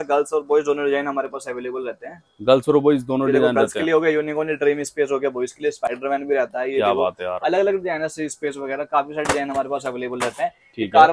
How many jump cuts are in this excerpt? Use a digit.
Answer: 0